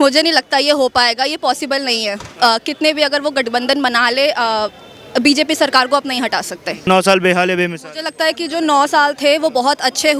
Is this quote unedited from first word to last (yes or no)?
no